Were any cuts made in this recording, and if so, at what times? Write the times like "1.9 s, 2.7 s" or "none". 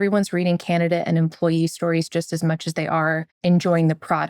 3.3 s